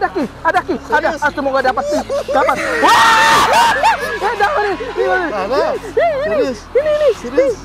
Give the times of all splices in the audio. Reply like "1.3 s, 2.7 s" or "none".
none